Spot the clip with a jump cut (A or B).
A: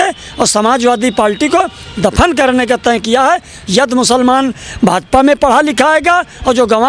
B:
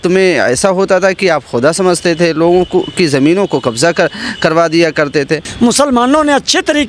B